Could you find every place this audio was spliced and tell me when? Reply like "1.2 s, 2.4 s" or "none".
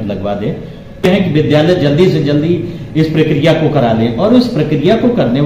1.0 s